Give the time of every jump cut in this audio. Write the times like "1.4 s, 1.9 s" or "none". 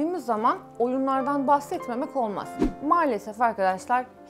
none

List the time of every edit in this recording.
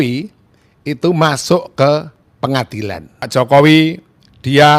3.2 s

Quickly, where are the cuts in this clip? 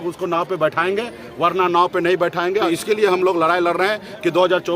2.7 s

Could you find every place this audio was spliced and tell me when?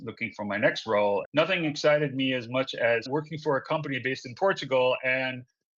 3.1 s

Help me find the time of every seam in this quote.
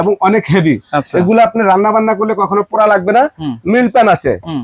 none

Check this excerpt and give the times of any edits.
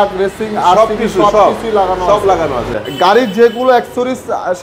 2.7 s

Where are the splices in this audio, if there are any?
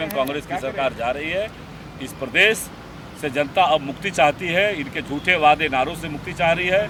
none

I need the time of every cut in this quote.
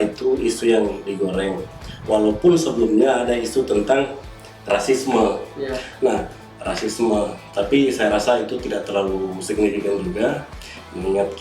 none

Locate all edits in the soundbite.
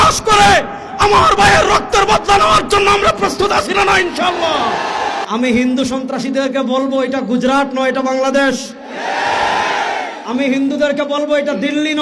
5.2 s

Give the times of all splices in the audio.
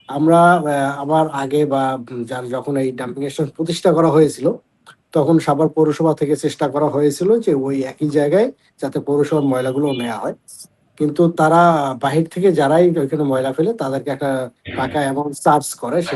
none

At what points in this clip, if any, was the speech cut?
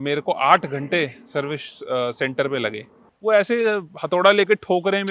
2.9 s

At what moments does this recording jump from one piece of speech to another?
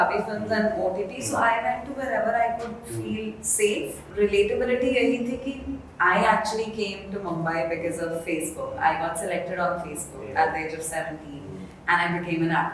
4.0 s

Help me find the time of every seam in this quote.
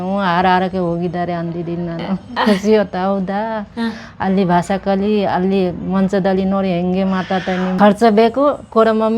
7.8 s

